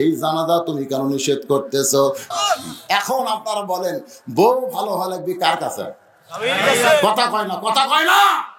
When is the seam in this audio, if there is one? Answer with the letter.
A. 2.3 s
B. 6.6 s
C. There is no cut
A